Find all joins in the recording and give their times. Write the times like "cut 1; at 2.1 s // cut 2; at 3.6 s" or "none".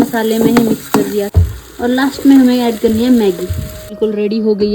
cut 1; at 1.3 s // cut 2; at 3.9 s